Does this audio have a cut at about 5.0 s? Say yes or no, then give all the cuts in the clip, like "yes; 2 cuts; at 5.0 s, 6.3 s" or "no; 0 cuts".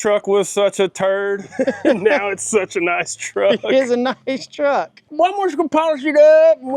yes; 1 cut; at 5.0 s